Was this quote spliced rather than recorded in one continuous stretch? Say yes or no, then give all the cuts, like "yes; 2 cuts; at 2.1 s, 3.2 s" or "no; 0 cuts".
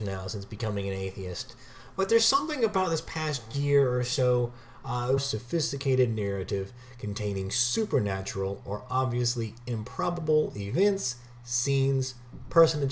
no; 0 cuts